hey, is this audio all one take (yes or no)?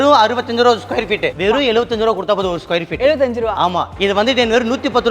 no